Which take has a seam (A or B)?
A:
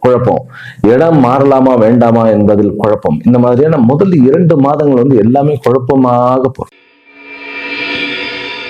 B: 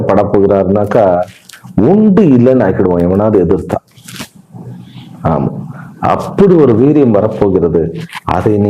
A